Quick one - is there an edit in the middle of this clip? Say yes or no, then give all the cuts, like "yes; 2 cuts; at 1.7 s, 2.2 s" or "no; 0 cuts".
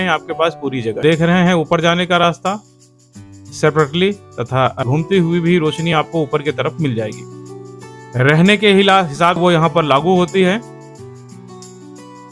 yes; 3 cuts; at 1.0 s, 4.8 s, 9.4 s